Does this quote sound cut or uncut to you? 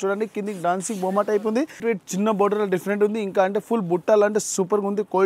cut